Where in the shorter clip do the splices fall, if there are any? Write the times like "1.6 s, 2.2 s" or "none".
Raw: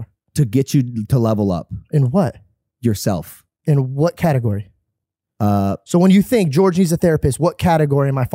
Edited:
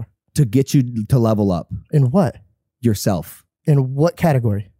none